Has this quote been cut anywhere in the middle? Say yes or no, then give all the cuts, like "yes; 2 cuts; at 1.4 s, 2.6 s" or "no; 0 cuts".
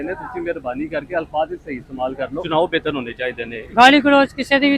yes; 2 cuts; at 2.4 s, 3.5 s